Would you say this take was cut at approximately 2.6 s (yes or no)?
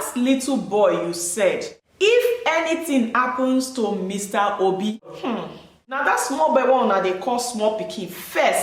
no